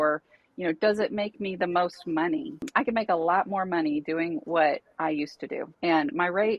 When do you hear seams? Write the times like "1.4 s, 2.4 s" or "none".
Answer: 2.7 s, 5.7 s